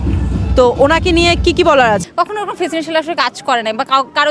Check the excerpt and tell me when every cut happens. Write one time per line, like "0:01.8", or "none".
0:02.1